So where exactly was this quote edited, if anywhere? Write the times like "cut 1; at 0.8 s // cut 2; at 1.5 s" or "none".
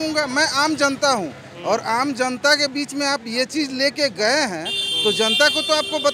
none